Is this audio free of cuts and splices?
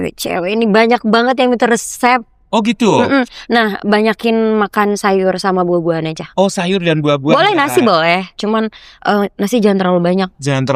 yes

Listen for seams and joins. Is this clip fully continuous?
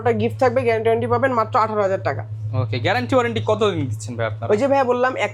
yes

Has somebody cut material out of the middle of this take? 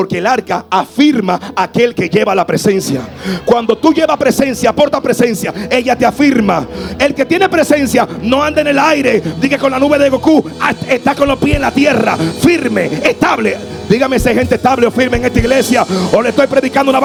no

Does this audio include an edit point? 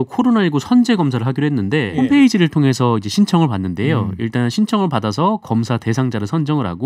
yes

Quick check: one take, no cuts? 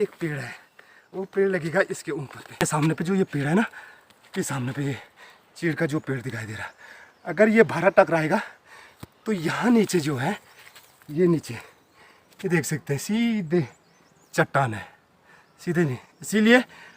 no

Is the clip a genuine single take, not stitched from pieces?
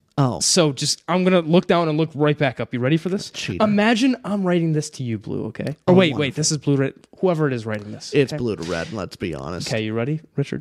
yes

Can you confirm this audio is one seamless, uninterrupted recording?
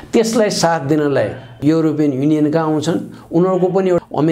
yes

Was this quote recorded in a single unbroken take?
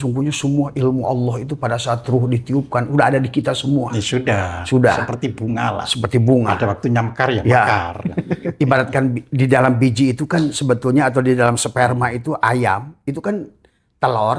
yes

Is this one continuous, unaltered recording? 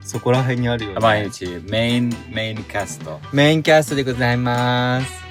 yes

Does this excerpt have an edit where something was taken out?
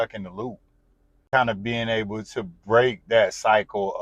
yes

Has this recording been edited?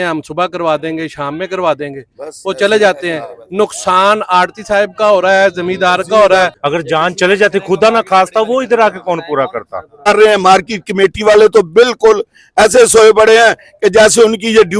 yes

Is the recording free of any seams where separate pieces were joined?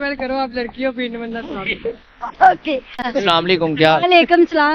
yes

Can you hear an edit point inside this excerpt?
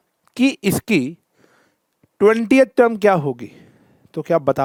no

